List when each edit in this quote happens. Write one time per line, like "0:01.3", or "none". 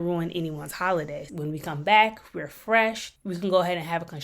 0:01.3